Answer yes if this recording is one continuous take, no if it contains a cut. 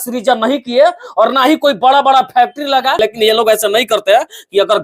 no